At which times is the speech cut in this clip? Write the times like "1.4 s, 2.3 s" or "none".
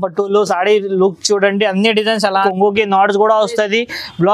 2.5 s